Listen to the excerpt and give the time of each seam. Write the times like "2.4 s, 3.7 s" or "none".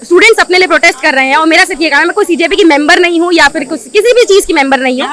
none